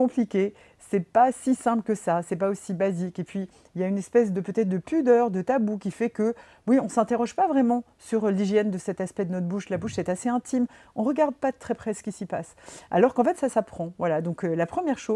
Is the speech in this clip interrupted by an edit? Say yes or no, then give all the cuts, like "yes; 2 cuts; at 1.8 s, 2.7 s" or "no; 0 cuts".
no; 0 cuts